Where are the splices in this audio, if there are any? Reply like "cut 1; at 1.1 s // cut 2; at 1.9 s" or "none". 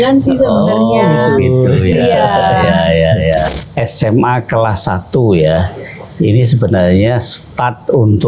cut 1; at 3.4 s